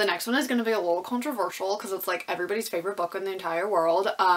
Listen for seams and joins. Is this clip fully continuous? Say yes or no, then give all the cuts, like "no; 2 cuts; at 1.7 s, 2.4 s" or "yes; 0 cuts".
yes; 0 cuts